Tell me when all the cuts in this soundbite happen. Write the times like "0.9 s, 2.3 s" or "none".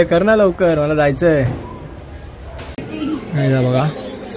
2.8 s